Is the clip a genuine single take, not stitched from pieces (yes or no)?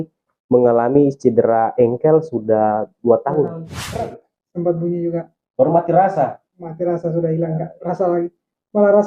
no